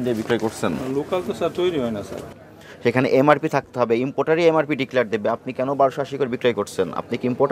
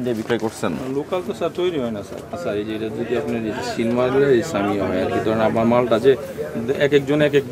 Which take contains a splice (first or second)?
first